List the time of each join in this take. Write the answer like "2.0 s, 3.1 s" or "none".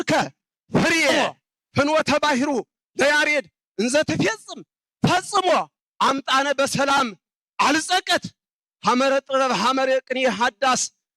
1.1 s